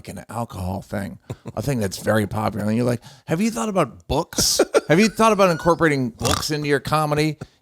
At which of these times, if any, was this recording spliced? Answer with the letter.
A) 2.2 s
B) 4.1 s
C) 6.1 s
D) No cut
C